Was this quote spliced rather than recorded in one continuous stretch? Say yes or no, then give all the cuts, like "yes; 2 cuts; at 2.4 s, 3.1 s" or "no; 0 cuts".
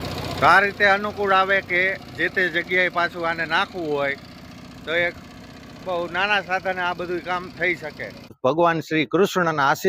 yes; 1 cut; at 8.3 s